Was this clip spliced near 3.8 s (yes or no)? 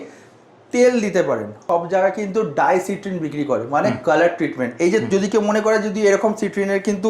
no